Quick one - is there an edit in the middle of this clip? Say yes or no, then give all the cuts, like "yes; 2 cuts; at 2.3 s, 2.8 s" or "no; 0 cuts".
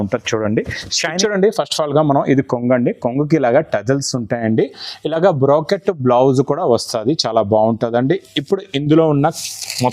yes; 1 cut; at 1.1 s